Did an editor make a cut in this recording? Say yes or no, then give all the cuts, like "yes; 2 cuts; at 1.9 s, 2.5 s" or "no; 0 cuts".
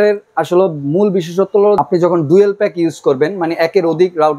yes; 1 cut; at 1.8 s